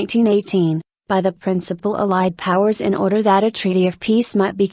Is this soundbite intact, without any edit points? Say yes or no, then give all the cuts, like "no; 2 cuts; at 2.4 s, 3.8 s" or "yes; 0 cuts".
yes; 0 cuts